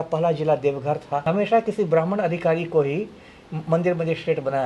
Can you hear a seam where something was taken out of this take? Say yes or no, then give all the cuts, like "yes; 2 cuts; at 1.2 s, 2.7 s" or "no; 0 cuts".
yes; 1 cut; at 1.2 s